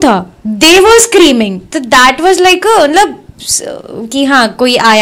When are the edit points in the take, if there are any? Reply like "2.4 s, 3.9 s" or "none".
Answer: none